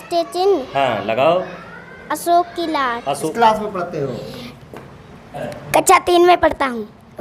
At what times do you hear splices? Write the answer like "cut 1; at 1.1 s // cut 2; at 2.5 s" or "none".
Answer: cut 1; at 3.3 s